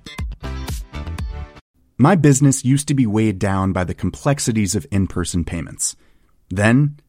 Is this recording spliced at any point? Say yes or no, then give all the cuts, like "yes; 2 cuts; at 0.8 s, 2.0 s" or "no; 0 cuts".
yes; 1 cut; at 1.6 s